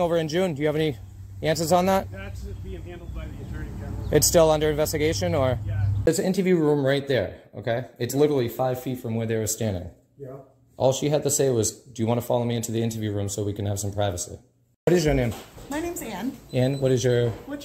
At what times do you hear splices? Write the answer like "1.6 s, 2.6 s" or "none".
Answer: 6.1 s, 14.9 s